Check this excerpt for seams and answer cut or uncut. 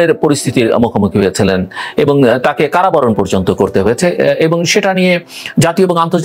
uncut